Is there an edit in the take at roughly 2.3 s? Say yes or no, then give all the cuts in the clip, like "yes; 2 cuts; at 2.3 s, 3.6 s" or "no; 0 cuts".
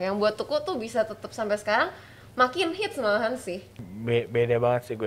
no; 1 cut; at 3.8 s